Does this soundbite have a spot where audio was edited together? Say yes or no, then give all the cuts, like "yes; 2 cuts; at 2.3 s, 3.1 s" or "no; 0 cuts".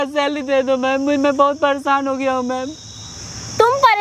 no; 0 cuts